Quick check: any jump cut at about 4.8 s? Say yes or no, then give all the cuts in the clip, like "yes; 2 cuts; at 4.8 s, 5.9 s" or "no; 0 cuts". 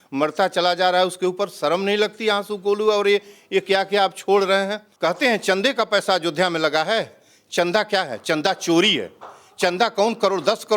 yes; 1 cut; at 4.8 s